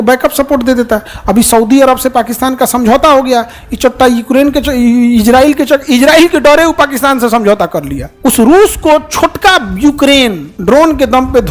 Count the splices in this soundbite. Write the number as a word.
two